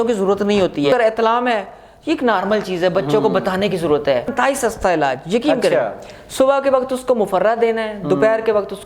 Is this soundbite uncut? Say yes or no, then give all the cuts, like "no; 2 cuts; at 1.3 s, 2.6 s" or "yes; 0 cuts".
no; 2 cuts; at 0.9 s, 4.3 s